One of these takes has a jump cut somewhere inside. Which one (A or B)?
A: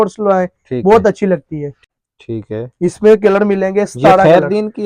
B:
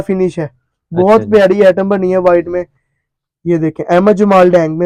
A